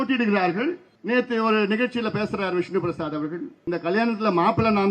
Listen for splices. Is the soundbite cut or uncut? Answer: cut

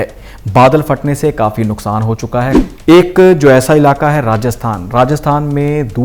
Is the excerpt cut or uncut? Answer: cut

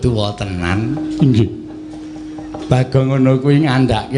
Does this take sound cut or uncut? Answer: uncut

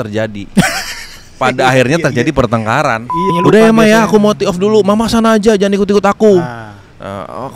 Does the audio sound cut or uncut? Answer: cut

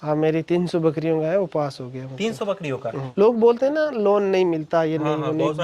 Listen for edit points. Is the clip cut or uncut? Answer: cut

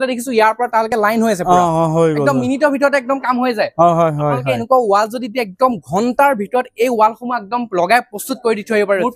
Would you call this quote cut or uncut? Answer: uncut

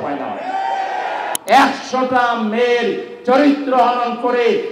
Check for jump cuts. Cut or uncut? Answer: cut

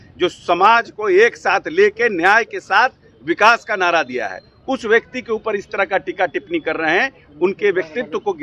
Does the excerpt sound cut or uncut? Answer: uncut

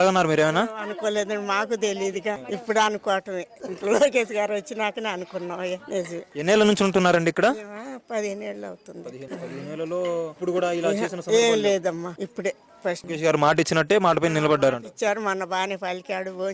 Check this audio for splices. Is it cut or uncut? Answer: uncut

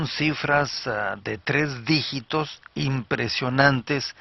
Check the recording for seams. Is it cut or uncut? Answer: cut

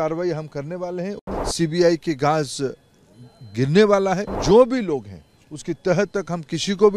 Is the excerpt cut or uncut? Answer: cut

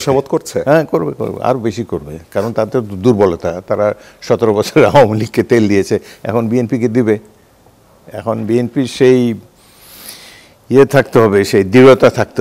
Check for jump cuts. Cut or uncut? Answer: uncut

